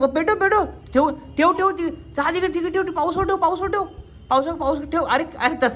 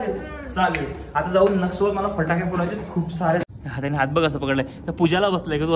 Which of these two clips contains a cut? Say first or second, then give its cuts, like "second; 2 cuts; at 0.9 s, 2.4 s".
second; 1 cut; at 3.4 s